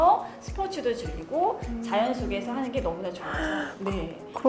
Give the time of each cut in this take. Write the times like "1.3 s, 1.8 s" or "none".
none